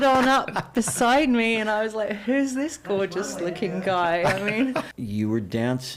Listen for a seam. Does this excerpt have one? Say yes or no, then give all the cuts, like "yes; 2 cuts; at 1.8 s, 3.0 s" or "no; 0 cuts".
yes; 1 cut; at 4.9 s